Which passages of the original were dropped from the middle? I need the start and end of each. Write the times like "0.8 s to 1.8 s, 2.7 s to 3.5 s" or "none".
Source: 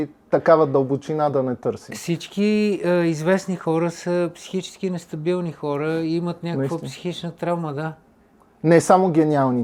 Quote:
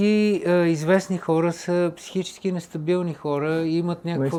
none